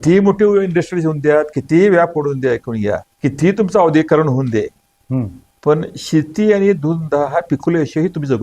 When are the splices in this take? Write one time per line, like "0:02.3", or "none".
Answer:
0:03.1
0:05.4